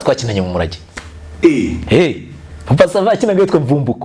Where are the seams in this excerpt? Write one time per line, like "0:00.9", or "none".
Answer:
none